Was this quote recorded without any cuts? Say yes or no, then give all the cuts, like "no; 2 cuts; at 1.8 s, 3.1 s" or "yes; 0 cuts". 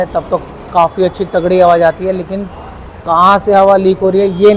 yes; 0 cuts